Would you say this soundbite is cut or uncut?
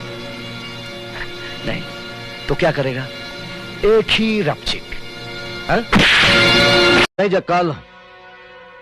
cut